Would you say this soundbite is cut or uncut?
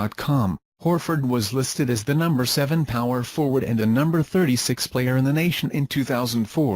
cut